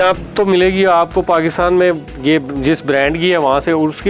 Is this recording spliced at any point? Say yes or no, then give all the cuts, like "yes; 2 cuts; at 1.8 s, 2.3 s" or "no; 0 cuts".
no; 0 cuts